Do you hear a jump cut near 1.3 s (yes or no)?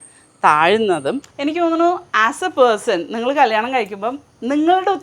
yes